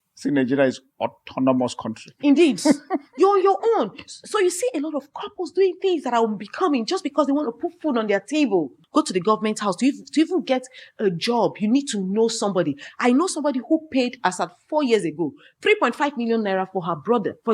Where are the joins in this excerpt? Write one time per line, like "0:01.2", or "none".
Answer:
0:08.8